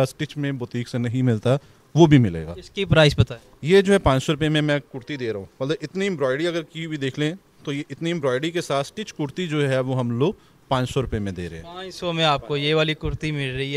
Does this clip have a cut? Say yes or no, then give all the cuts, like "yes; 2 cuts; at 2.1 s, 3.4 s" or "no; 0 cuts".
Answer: no; 0 cuts